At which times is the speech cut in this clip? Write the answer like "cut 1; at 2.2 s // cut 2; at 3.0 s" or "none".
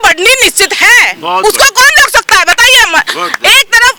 none